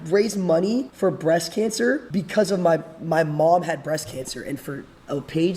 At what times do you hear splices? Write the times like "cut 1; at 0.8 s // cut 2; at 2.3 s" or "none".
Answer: cut 1; at 0.9 s // cut 2; at 2.1 s